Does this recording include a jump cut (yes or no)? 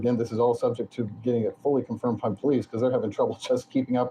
no